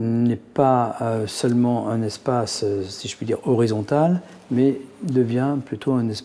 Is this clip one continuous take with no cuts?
yes; 0 cuts

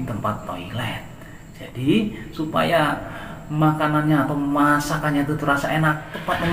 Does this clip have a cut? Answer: no; 0 cuts

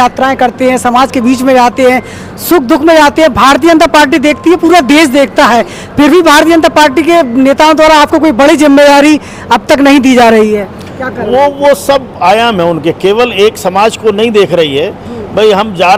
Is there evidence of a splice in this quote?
no; 0 cuts

